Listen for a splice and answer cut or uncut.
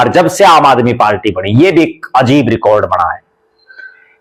uncut